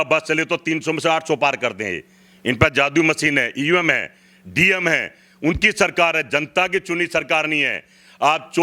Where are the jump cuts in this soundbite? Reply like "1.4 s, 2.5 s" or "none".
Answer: none

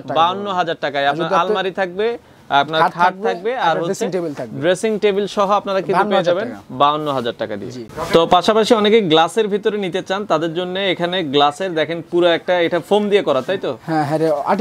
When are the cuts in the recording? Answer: none

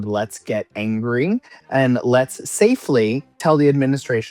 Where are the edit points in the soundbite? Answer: 3.3 s

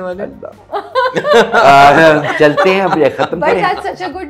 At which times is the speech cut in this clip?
none

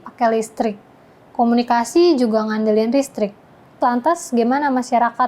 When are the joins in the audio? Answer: 3.8 s

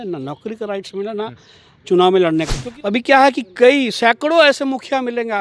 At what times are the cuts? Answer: 2.6 s

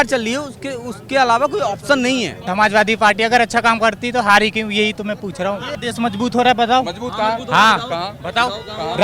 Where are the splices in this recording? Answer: none

